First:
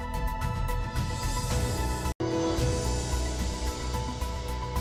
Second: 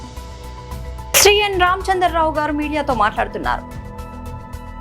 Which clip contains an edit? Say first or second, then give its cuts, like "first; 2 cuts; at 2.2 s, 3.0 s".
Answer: second; 1 cut; at 1.0 s